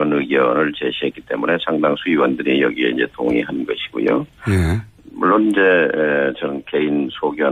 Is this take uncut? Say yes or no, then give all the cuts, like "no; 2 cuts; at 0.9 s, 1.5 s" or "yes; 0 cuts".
yes; 0 cuts